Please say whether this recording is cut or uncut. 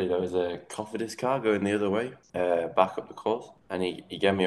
cut